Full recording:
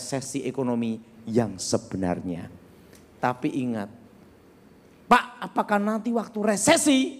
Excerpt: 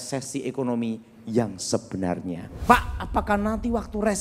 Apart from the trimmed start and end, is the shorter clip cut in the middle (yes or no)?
yes